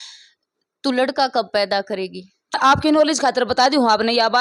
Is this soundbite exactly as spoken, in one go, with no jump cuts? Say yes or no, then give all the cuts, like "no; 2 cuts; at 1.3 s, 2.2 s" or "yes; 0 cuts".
no; 1 cut; at 2.6 s